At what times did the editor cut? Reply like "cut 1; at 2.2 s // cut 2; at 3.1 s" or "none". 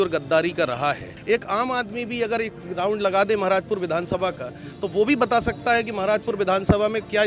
cut 1; at 1.1 s